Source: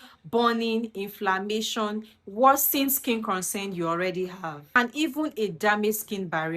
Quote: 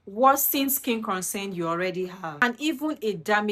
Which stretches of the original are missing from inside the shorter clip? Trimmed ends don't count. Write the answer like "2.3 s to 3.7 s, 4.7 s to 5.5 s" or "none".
4.5 s to 4.7 s